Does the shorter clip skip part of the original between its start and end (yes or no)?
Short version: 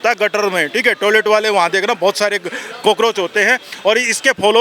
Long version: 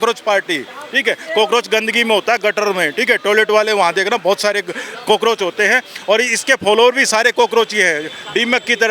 no